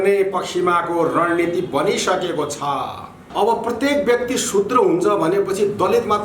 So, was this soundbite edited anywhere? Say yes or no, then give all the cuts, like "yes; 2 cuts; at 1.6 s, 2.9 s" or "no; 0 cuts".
yes; 1 cut; at 3.2 s